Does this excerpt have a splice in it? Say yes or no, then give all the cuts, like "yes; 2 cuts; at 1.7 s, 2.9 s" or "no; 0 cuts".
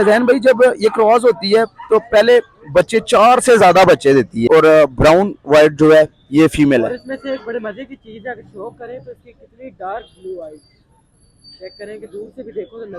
yes; 1 cut; at 4.4 s